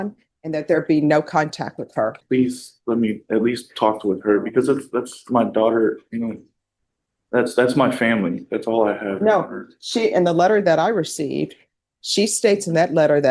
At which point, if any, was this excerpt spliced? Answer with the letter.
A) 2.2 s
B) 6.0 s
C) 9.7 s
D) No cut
A